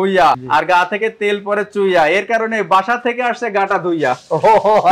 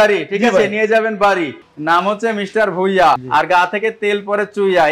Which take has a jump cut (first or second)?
second